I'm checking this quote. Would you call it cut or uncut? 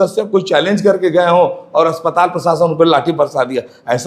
uncut